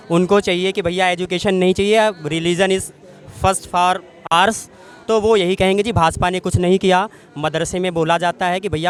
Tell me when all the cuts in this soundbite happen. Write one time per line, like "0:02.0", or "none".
none